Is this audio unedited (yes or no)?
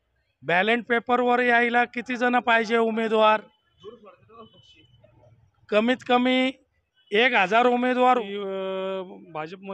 no